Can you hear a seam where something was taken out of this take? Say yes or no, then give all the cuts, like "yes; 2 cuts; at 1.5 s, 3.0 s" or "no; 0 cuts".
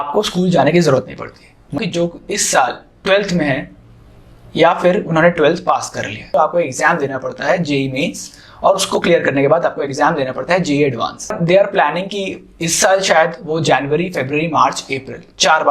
yes; 3 cuts; at 1.8 s, 6.2 s, 11.4 s